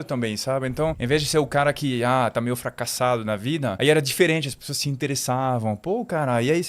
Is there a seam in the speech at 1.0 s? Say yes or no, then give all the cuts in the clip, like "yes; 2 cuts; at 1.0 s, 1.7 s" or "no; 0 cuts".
yes; 1 cut; at 1.0 s